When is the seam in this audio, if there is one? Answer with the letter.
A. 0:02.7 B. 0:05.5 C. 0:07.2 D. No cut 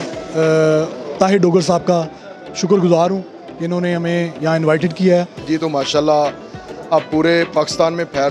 B